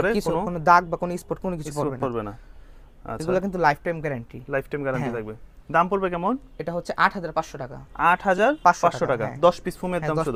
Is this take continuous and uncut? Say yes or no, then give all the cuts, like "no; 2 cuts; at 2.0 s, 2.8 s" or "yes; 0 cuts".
yes; 0 cuts